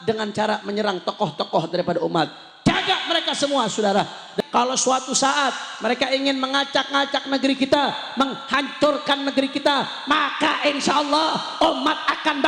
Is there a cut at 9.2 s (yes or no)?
no